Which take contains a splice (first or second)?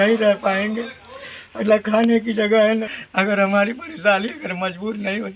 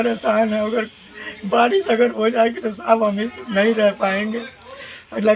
first